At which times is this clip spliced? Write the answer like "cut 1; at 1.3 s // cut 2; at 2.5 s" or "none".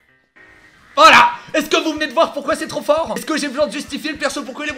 cut 1; at 3.2 s